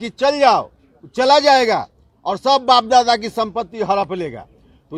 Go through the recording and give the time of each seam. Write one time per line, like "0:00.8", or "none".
none

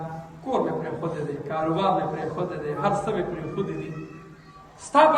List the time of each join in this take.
none

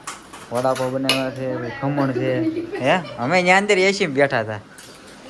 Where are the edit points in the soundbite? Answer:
none

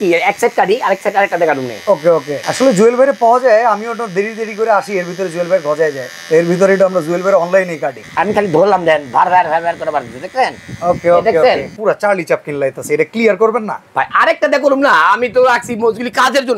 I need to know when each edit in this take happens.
0:02.4
0:06.1
0:07.9
0:11.7

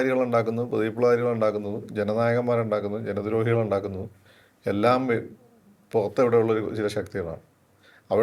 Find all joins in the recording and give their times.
none

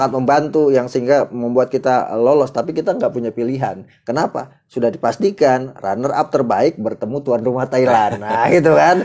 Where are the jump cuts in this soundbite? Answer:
none

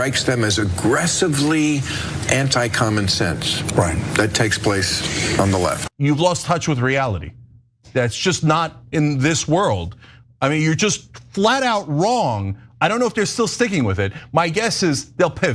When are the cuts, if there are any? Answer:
0:05.8

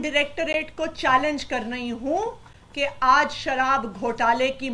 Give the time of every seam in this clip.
none

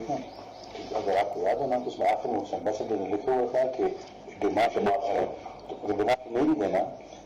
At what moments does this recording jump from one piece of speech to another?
none

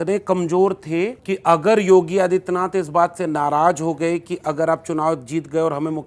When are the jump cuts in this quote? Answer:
0:01.2

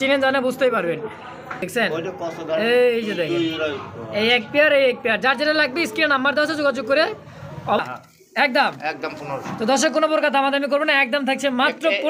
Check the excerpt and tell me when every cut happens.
0:01.6
0:07.8

